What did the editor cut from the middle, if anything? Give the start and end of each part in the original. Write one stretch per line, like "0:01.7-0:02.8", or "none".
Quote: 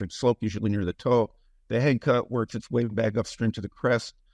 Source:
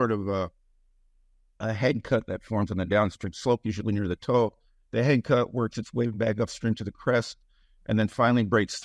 none